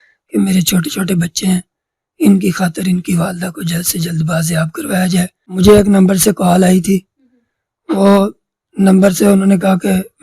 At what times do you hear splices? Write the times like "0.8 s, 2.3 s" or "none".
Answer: 5.4 s

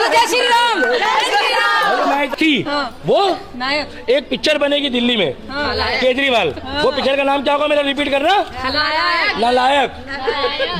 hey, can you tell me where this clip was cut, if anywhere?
2.3 s

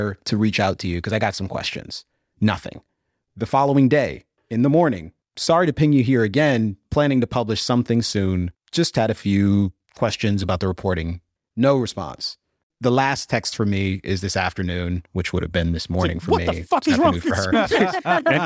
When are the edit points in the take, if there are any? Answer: 6.8 s, 10.4 s, 12.6 s

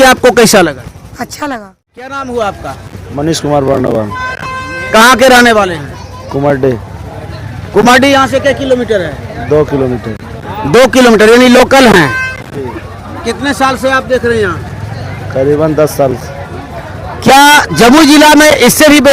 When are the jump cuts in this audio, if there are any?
2.2 s

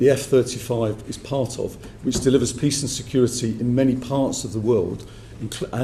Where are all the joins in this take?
none

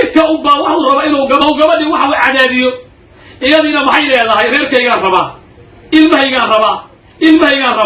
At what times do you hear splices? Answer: 1.4 s

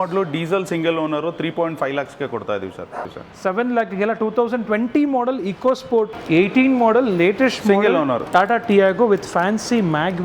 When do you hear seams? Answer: 3.2 s, 6.2 s

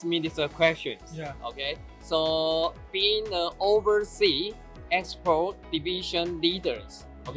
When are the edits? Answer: none

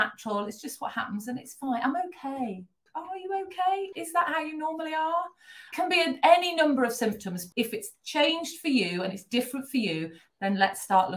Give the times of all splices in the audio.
2.8 s, 3.9 s, 5.7 s, 7.4 s

